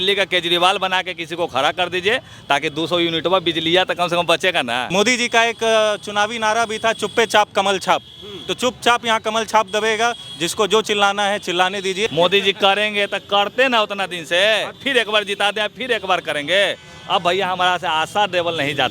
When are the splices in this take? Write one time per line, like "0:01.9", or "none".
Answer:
0:04.9
0:12.1
0:14.8